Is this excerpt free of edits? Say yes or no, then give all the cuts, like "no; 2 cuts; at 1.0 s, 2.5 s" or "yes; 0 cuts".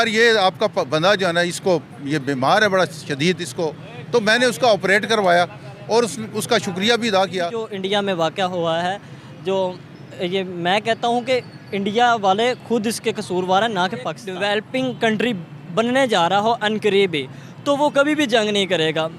no; 2 cuts; at 7.6 s, 14.2 s